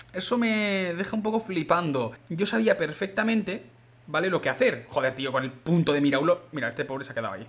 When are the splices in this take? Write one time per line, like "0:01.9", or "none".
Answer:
0:02.2